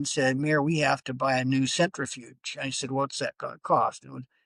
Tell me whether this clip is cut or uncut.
uncut